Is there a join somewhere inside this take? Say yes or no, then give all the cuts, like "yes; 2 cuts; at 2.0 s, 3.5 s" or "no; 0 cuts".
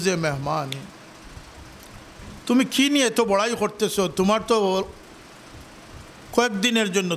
no; 0 cuts